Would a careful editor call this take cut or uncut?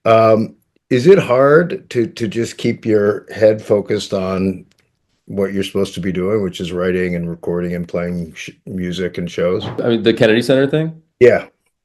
cut